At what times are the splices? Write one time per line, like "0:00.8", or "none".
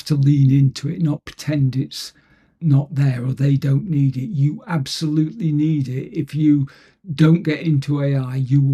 none